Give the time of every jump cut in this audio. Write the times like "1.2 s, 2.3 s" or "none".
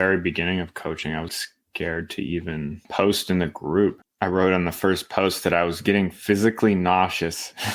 1.3 s, 2.8 s, 4.1 s

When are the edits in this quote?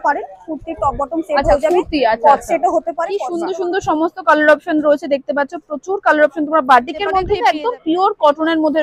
3.3 s, 7.3 s

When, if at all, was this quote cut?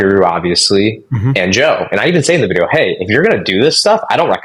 none

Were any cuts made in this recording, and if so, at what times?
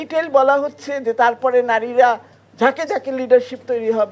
none

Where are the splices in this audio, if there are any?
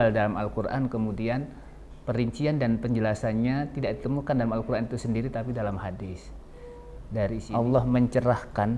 7.4 s

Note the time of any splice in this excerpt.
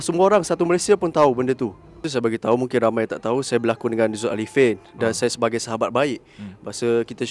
1.9 s

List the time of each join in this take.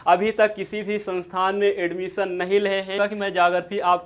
2.9 s

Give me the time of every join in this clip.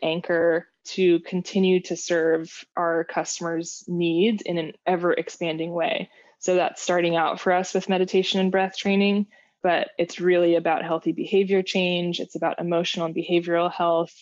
none

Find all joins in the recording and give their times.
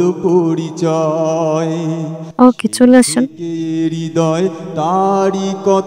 2.2 s, 3.4 s

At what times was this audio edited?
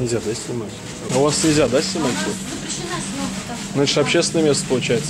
1.1 s

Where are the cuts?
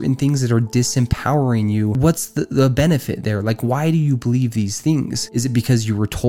2.0 s, 5.2 s

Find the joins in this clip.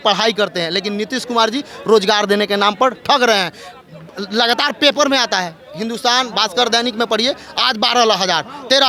none

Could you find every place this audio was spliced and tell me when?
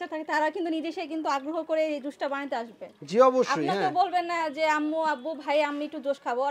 none

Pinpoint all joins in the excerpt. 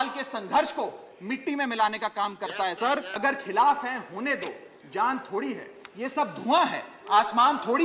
3.2 s

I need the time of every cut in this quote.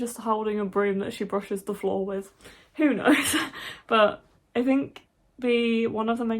none

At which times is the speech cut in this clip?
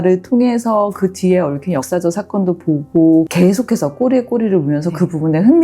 3.3 s

